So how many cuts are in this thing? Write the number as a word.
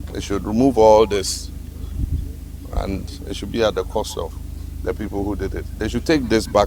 zero